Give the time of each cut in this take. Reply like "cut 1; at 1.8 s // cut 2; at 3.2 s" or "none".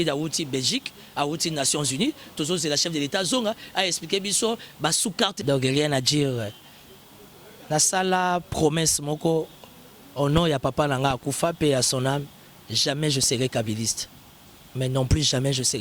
cut 1; at 5.4 s

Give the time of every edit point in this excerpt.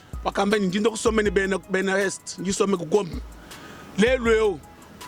none

